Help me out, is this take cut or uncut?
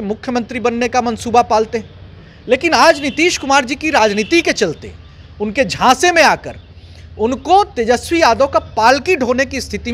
uncut